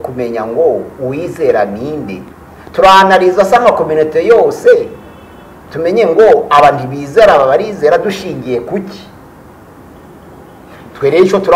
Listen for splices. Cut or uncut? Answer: uncut